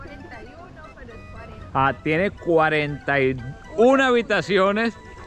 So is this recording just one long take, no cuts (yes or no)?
yes